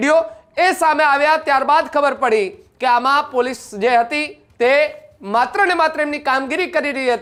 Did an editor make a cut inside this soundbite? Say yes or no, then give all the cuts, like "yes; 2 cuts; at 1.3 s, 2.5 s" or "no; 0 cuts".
no; 0 cuts